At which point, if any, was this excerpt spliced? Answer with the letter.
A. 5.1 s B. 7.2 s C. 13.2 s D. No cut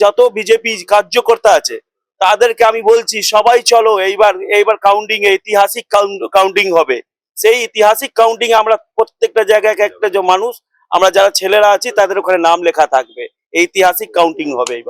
D